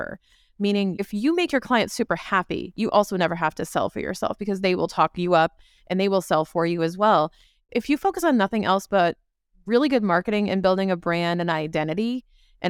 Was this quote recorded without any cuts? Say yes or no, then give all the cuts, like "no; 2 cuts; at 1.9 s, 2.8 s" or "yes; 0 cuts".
no; 1 cut; at 0.9 s